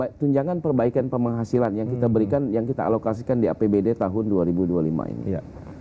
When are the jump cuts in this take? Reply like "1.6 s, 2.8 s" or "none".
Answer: none